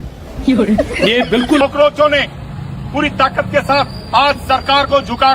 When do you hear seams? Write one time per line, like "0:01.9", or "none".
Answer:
0:01.6